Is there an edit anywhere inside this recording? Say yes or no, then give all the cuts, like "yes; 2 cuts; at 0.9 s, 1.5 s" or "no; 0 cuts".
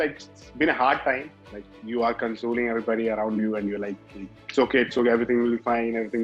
no; 0 cuts